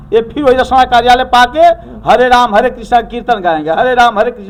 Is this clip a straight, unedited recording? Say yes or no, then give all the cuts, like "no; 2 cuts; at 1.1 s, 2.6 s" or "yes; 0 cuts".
yes; 0 cuts